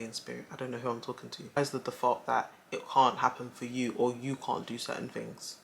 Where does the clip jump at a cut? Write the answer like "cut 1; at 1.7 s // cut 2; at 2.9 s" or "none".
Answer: cut 1; at 1.6 s